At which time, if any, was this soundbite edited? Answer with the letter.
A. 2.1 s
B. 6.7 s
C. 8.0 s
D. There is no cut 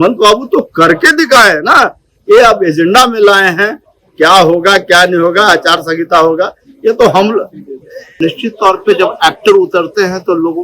C